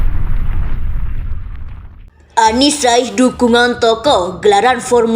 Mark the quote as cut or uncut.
cut